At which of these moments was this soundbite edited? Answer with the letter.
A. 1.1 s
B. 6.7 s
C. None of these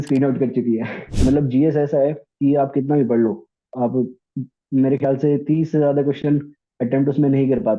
A